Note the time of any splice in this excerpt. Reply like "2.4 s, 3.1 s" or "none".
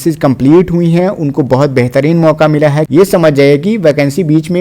2.9 s